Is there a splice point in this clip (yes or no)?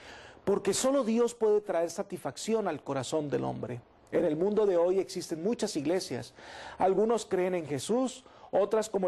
yes